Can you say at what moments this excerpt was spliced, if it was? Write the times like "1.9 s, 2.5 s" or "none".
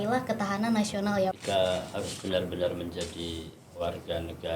1.4 s